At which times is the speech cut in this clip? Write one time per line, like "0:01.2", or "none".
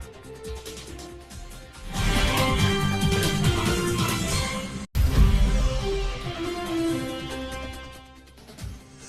none